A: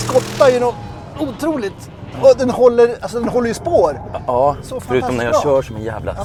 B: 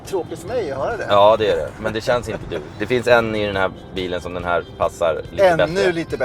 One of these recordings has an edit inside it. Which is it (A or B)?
B